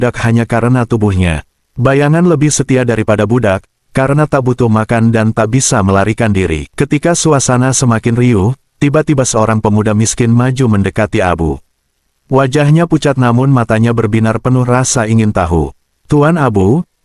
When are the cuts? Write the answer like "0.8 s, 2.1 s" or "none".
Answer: 6.6 s